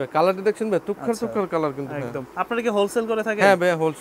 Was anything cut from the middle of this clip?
no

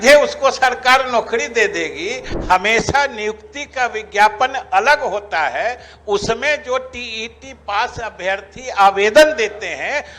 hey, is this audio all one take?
no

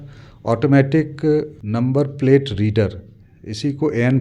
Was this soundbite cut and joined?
yes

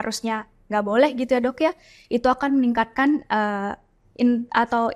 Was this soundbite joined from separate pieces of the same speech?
no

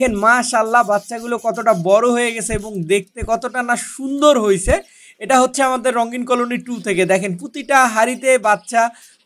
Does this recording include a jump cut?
no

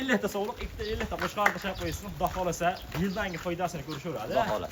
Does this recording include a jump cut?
no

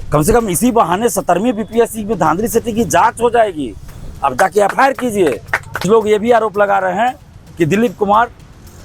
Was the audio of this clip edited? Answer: yes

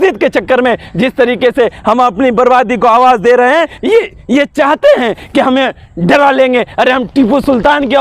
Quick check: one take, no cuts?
no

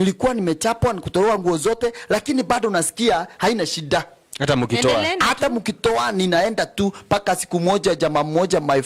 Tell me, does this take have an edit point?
no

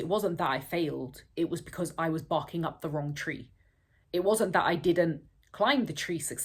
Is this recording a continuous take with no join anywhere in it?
yes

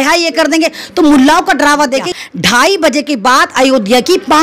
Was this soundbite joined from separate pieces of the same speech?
yes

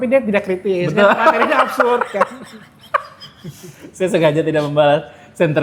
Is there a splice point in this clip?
no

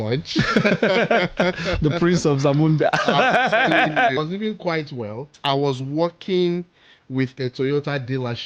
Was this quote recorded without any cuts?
no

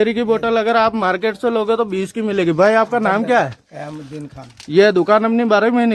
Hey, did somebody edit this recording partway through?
no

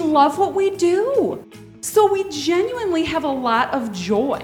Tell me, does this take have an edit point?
no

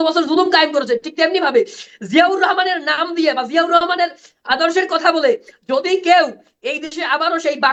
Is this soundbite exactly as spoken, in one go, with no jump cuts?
yes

